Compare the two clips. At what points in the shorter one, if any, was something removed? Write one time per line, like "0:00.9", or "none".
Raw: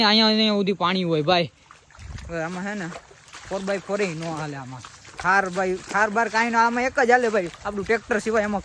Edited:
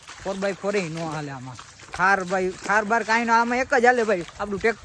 none